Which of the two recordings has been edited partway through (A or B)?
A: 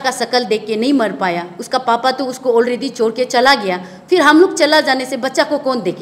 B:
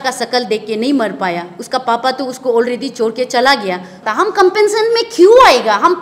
B